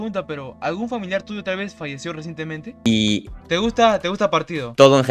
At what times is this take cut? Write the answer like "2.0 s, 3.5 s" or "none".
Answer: 2.7 s